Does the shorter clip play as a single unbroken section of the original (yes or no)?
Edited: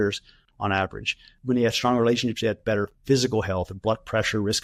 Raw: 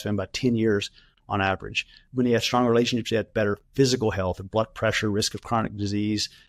yes